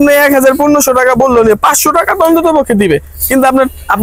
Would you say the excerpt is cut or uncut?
uncut